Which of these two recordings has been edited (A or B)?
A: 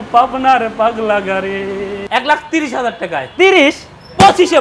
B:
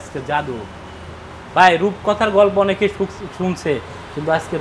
A